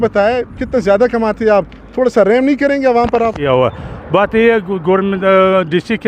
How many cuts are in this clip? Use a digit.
0